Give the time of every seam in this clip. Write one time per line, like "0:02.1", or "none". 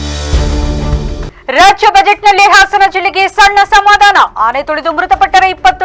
0:01.2